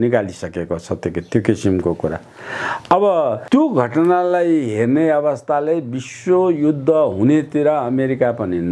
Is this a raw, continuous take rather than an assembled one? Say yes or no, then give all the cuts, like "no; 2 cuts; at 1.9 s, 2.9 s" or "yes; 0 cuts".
yes; 0 cuts